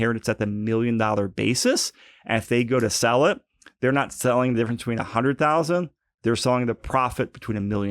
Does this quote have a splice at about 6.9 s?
yes; 1 cut; at 6.9 s

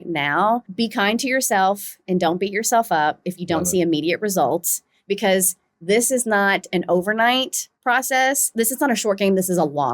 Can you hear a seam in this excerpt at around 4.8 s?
no; 1 cut; at 8.5 s

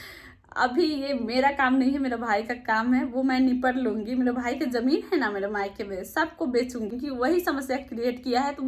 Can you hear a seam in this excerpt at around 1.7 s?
no; 1 cut; at 6.9 s

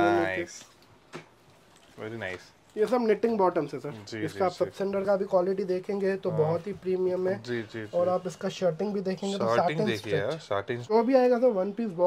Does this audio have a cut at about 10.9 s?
yes; 1 cut; at 10.9 s

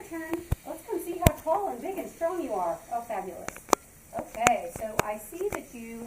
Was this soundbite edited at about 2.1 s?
no; 1 cut; at 4.0 s

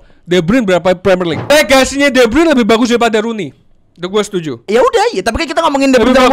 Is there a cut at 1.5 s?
yes; 2 cuts; at 1.5 s, 4.7 s

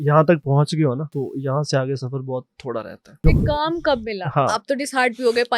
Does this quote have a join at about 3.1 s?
yes; 2 cuts; at 1.1 s, 3.1 s

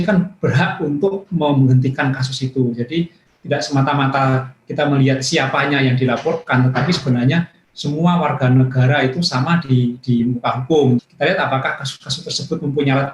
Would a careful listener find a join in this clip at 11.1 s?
yes; 1 cut; at 11.1 s

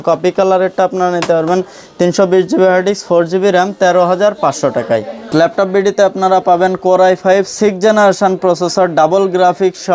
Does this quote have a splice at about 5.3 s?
yes; 1 cut; at 5.3 s

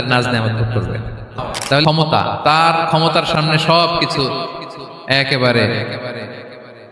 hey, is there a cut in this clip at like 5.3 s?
no; 1 cut; at 1.8 s

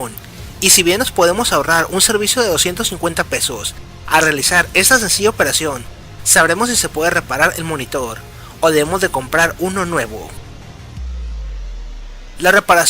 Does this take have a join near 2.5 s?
no; 1 cut; at 11.3 s

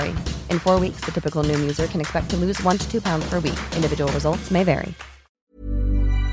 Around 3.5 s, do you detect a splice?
no; 1 cut; at 5.4 s

